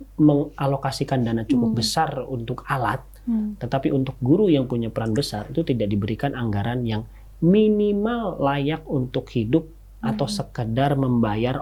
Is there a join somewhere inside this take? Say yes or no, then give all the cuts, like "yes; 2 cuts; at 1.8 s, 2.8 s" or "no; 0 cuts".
no; 0 cuts